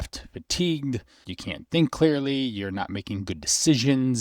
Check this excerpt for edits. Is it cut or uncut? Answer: cut